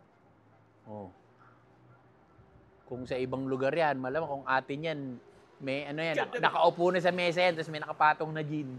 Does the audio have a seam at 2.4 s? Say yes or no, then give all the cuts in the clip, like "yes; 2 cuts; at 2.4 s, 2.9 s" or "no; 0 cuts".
no; 0 cuts